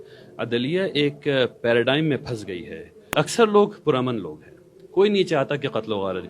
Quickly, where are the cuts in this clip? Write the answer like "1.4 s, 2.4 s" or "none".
3.1 s